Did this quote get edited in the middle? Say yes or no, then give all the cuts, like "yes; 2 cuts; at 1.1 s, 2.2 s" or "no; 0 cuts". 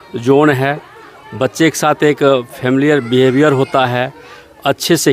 no; 0 cuts